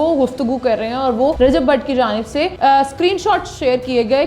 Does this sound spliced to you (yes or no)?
yes